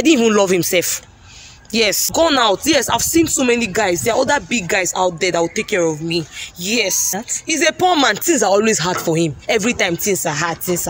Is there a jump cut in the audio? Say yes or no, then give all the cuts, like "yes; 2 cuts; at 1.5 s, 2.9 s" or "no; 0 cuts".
yes; 2 cuts; at 2.1 s, 7.2 s